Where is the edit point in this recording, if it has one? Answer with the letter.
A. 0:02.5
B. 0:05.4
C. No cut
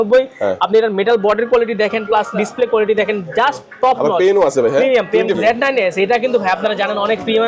B